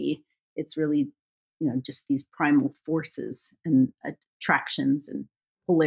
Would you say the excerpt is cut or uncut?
uncut